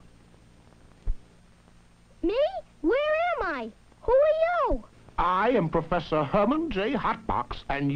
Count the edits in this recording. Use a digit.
1